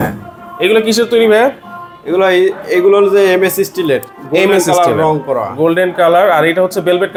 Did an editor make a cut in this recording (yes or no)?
no